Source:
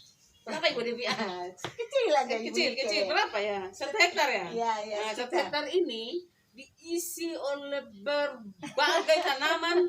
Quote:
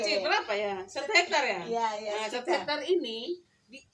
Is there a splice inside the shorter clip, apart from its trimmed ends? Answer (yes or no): no